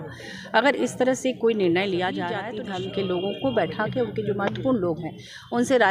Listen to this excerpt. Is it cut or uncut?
cut